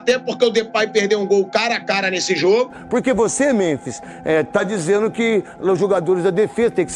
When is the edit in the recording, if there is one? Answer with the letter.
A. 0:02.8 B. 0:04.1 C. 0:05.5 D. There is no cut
A